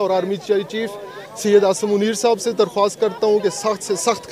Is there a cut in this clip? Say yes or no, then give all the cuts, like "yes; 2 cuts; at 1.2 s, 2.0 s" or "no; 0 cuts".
no; 0 cuts